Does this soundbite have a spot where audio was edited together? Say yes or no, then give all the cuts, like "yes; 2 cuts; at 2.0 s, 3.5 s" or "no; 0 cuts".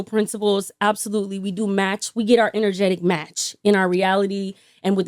no; 0 cuts